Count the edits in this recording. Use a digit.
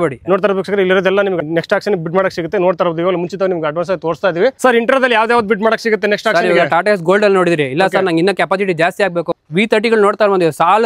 3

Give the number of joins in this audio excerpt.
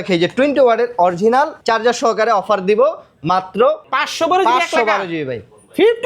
2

